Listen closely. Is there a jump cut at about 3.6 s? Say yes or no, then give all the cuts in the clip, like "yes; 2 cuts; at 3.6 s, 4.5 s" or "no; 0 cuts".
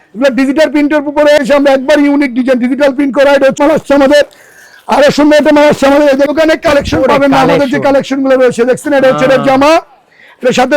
yes; 3 cuts; at 1.4 s, 3.6 s, 6.3 s